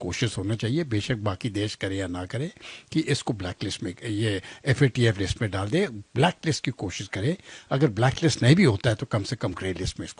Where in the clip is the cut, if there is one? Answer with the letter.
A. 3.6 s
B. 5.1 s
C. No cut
C